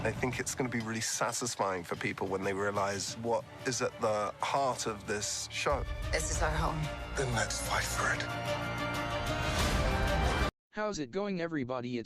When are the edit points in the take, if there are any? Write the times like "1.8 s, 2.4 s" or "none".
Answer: 10.6 s

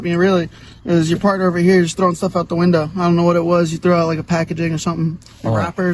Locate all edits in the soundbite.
3.1 s

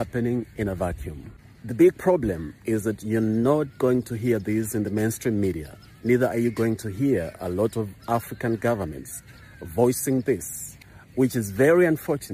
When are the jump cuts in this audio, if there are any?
1.6 s

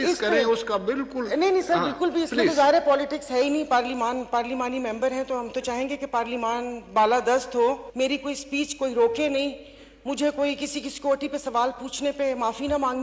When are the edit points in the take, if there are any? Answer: 7.9 s

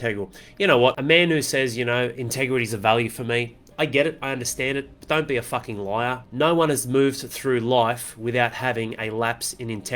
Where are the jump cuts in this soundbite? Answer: 1.0 s

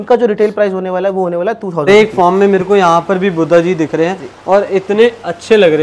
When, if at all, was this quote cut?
1.9 s

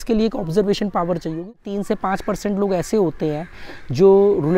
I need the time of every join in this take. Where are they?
1.6 s

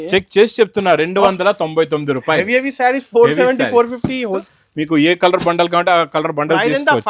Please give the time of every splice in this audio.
4.5 s

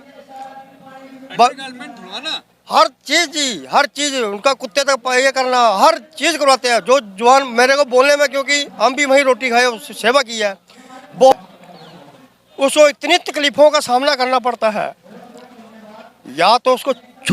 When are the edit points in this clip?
11.3 s

